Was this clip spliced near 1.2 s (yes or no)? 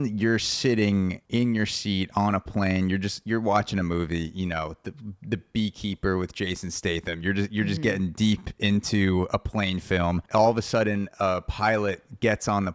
yes